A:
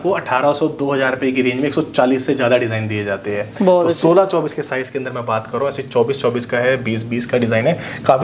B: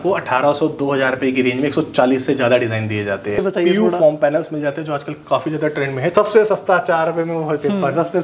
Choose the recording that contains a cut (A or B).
B